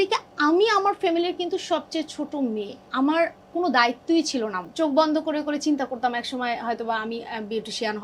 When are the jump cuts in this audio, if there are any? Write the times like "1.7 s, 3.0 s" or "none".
2.8 s, 4.6 s